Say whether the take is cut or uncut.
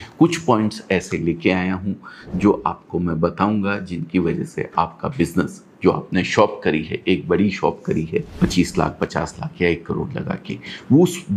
cut